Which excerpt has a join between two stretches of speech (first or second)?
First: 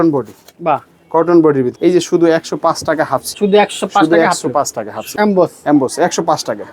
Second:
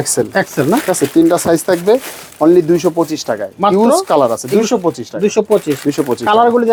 first